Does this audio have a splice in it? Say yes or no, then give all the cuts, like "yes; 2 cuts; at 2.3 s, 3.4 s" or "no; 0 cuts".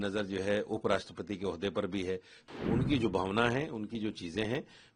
yes; 1 cut; at 2.4 s